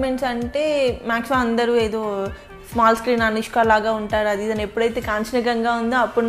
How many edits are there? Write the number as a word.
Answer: zero